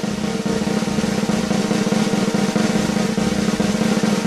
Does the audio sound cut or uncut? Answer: uncut